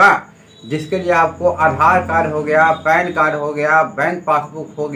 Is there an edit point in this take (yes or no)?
no